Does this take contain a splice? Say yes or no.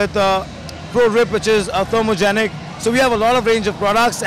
no